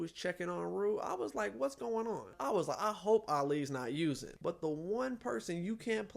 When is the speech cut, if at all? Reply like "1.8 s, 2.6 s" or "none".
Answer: 2.3 s, 4.3 s